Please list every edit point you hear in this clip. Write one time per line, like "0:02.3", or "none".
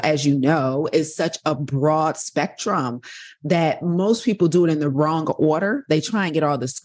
0:04.9